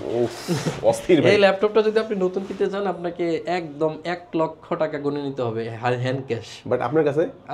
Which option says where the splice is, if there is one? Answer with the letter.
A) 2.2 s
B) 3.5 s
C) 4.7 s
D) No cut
D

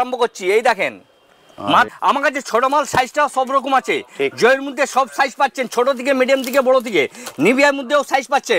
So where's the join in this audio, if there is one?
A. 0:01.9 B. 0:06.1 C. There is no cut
A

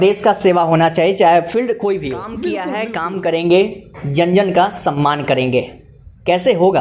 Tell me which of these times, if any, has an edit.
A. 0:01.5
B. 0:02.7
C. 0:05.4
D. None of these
B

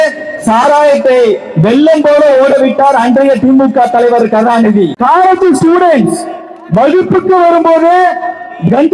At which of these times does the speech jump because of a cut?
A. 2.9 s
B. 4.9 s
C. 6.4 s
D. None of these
B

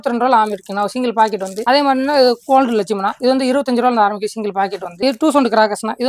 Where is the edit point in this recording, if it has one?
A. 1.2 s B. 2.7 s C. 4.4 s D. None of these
D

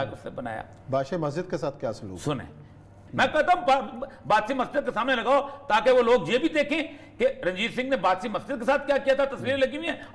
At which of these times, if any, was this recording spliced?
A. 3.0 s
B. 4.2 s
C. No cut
A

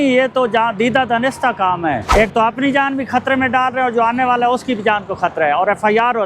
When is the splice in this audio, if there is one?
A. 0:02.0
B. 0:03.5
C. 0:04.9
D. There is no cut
A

